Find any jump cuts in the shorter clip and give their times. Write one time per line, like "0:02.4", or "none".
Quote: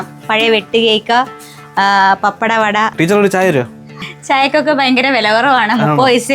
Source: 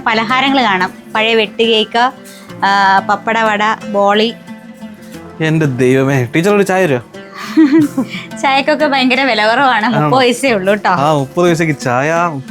0:02.9
0:04.0